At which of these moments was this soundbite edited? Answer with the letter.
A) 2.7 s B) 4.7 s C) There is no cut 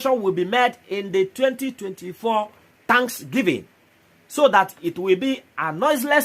A